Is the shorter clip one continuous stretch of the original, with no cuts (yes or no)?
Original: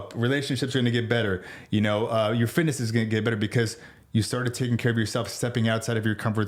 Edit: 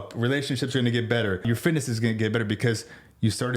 no